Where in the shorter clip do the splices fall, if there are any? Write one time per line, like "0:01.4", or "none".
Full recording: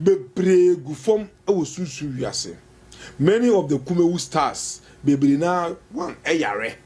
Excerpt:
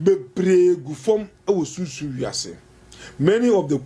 none

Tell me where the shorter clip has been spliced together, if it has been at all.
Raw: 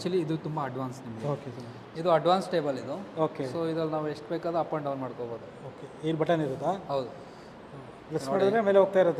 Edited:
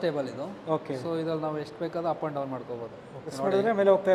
0:03.2

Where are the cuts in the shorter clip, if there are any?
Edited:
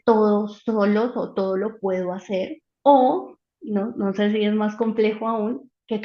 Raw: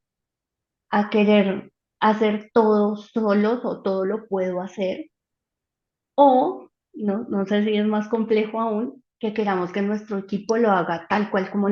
0:02.6

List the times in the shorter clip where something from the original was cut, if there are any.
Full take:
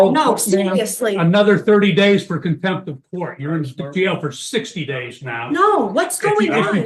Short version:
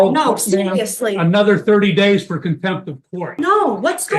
0:03.3

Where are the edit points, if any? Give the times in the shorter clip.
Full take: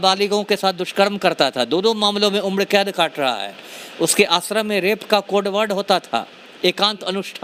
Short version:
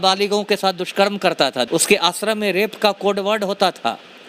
0:01.7

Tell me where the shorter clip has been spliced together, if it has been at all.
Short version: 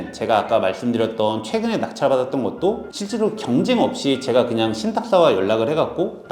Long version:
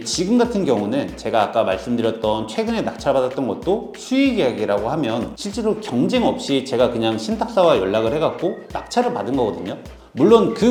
0:02.9

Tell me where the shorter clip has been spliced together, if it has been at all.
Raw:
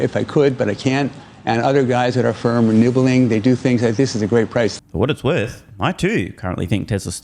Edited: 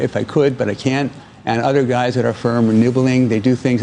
none

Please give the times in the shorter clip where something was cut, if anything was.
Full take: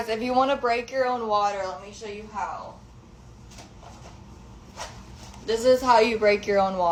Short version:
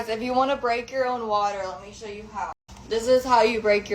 0:02.7

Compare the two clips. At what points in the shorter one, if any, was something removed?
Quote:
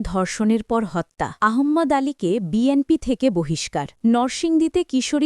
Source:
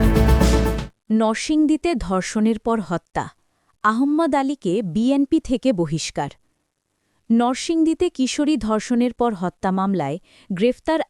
0:01.2
0:03.9

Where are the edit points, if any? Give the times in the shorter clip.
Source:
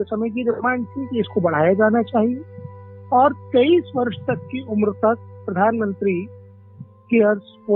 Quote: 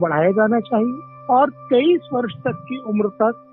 0:01.1

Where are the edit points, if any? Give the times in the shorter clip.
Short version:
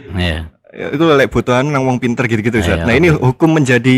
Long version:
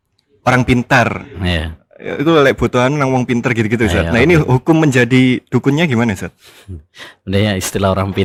none

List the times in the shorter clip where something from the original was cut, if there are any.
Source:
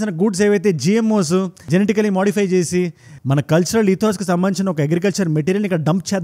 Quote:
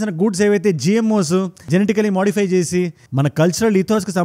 0:03.0

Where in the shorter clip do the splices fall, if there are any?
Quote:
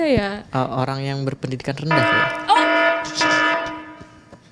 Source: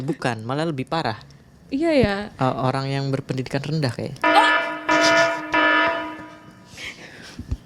0:02.3

